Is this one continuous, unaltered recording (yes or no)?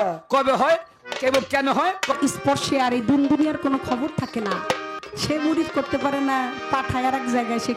no